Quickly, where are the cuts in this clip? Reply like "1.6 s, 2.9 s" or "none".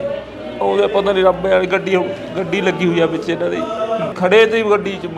4.1 s